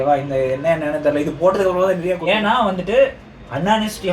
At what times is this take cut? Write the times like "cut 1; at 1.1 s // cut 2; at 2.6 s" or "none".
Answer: cut 1; at 2.2 s